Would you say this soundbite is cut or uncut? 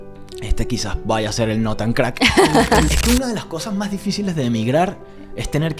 cut